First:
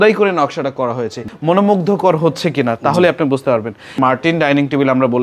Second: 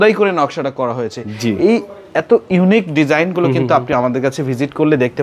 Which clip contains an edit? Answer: first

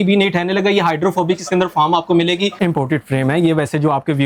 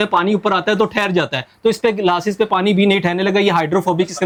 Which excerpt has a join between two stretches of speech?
first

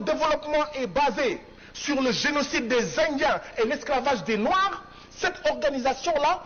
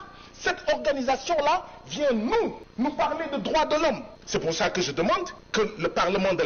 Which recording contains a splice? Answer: second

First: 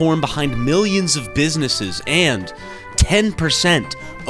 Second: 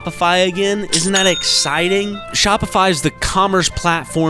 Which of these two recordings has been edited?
second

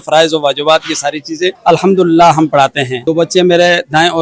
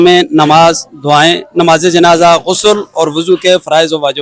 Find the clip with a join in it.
first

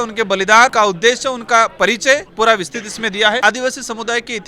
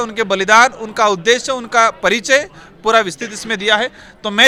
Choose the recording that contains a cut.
first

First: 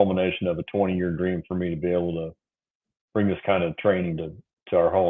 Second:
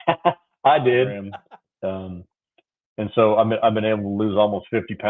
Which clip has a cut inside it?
second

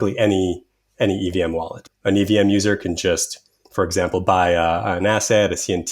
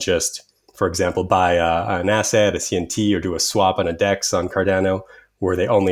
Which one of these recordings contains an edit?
first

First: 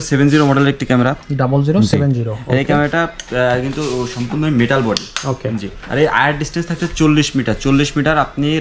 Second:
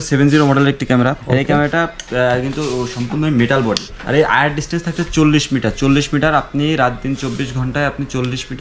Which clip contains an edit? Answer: second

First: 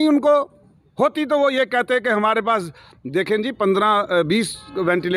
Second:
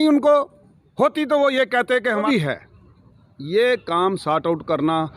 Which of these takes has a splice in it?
second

